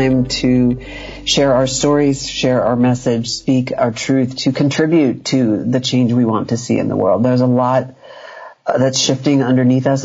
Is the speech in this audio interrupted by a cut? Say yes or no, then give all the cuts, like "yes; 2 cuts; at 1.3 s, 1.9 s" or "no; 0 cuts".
no; 0 cuts